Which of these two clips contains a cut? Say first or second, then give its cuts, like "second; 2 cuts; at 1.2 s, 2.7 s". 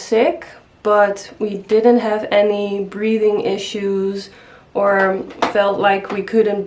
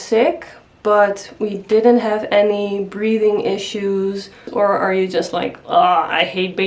second; 1 cut; at 4.5 s